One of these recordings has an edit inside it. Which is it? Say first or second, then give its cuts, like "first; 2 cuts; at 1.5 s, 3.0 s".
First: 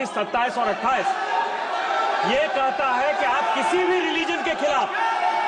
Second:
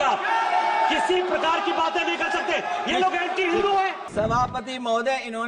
second; 1 cut; at 4.0 s